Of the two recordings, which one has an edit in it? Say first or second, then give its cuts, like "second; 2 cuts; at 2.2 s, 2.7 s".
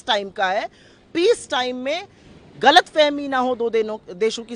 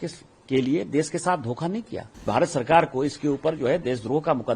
second; 1 cut; at 2.3 s